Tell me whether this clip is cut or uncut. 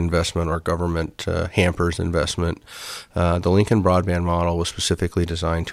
uncut